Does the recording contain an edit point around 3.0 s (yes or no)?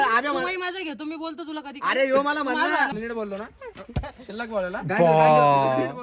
yes